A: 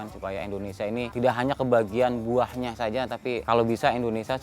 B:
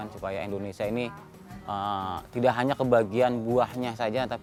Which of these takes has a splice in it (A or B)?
A